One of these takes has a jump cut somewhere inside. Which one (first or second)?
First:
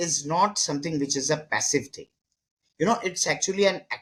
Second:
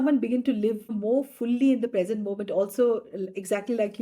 second